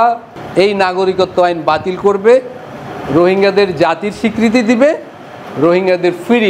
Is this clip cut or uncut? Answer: uncut